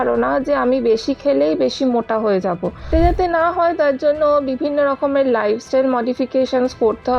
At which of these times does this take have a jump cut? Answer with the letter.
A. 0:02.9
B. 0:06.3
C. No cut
A